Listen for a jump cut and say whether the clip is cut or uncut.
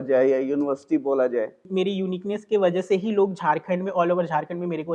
cut